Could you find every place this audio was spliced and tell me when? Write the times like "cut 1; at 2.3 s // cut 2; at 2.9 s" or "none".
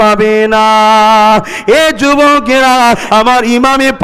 cut 1; at 3.0 s